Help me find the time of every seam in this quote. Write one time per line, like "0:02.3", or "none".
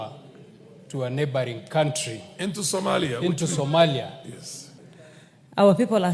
0:04.6